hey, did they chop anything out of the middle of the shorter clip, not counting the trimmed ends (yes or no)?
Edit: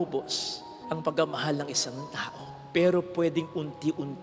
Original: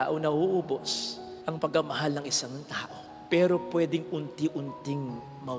no